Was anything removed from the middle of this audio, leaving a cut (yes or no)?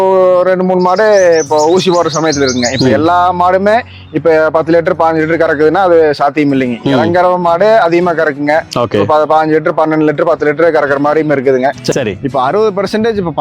yes